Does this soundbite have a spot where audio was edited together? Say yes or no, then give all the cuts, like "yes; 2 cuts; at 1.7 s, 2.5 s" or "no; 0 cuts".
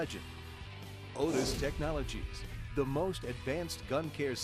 no; 0 cuts